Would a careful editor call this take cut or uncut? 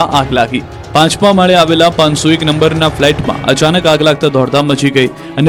uncut